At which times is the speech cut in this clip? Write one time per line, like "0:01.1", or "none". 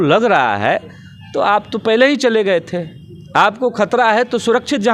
none

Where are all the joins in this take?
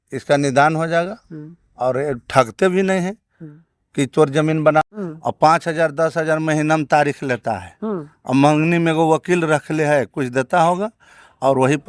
0:04.8

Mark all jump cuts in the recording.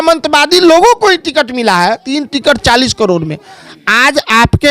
0:02.1

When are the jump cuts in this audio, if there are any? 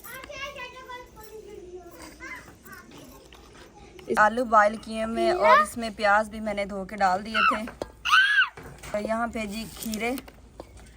0:04.2
0:08.9

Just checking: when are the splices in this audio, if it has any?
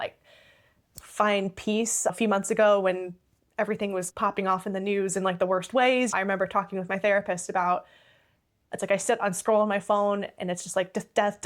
0:02.1
0:04.1
0:06.1

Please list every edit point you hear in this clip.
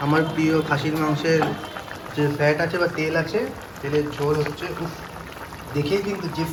none

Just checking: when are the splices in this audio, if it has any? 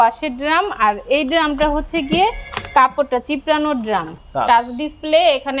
0:04.2

